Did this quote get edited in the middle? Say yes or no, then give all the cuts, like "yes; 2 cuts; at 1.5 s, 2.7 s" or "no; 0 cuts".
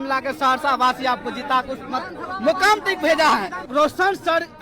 yes; 1 cut; at 3.7 s